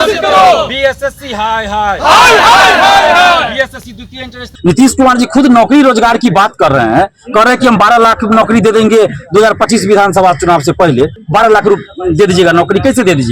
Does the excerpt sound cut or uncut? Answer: cut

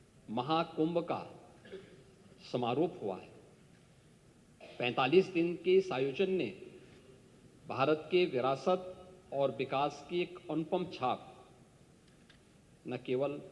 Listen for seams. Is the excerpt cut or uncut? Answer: uncut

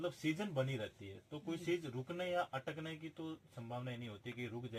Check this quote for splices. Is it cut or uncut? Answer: uncut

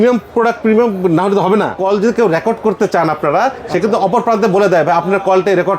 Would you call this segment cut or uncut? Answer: cut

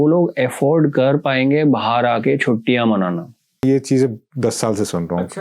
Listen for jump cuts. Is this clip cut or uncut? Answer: cut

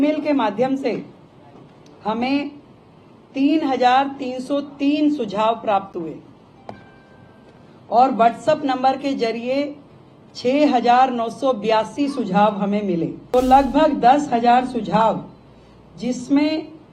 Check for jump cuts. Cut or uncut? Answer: cut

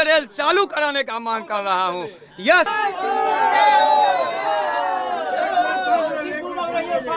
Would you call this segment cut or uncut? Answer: cut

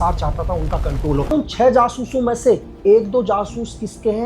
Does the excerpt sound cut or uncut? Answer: cut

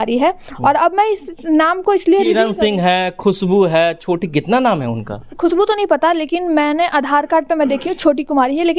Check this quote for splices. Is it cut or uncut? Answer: uncut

